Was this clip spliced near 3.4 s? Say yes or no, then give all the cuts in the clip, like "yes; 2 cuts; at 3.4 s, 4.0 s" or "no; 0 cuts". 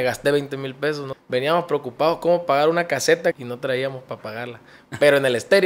yes; 2 cuts; at 1.1 s, 3.4 s